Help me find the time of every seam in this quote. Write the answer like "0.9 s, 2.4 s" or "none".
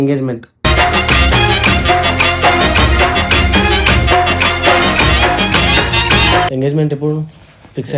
6.5 s